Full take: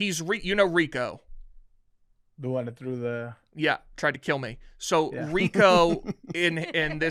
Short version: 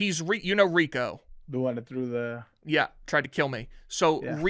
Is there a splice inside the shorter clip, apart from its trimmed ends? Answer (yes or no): yes